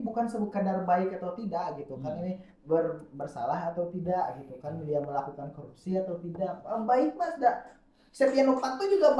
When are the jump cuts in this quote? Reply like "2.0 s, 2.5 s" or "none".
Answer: none